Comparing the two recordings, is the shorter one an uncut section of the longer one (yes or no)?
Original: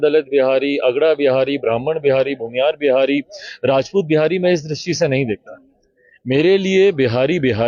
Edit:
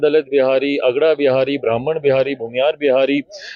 yes